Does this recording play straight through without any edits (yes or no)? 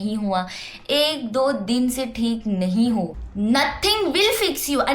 no